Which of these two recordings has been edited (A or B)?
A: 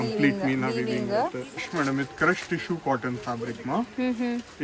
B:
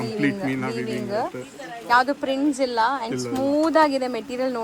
A